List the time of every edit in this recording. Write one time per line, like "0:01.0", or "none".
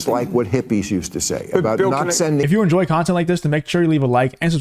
0:02.4